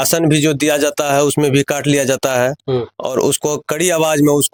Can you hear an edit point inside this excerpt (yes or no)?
no